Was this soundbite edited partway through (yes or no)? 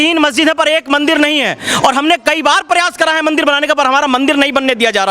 no